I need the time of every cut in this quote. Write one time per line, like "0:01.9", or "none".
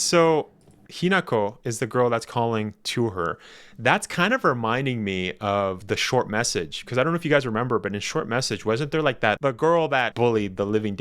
0:09.4